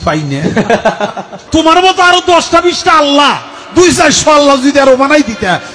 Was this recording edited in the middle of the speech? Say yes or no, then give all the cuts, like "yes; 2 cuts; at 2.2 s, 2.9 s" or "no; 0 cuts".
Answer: yes; 1 cut; at 1.3 s